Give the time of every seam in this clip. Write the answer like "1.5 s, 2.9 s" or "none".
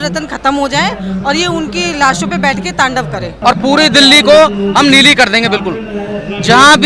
3.4 s